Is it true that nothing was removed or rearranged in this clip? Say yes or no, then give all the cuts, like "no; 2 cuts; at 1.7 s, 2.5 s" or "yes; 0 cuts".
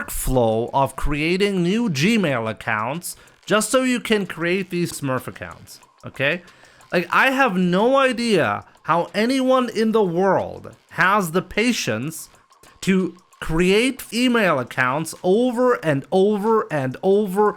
no; 2 cuts; at 4.9 s, 14.0 s